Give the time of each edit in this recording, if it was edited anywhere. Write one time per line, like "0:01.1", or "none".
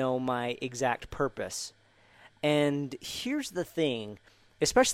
none